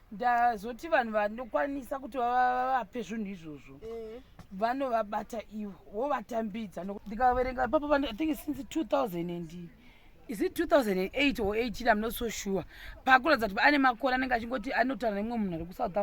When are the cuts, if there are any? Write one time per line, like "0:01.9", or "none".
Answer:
0:07.0